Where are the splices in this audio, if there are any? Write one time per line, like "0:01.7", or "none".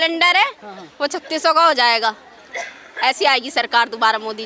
none